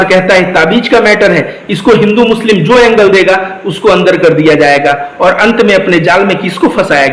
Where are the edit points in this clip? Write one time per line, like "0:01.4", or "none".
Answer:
none